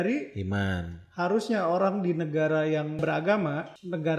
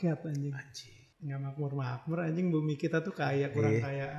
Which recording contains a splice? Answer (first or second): first